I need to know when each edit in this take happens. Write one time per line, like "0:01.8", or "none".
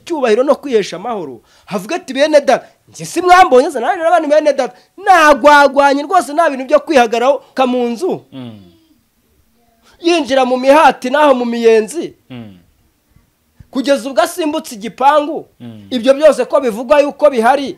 0:07.6